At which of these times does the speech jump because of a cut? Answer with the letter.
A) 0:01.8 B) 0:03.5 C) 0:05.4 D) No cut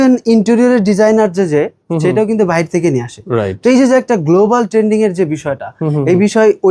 D